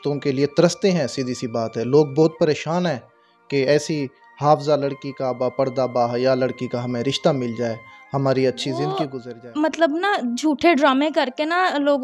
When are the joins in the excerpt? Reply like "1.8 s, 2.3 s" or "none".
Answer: 9.1 s